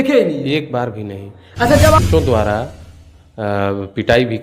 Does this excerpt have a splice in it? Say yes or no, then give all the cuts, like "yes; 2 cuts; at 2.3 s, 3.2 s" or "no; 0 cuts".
yes; 1 cut; at 1.9 s